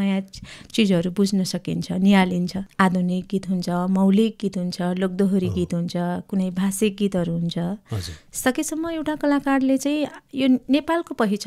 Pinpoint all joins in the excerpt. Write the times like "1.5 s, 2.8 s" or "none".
2.6 s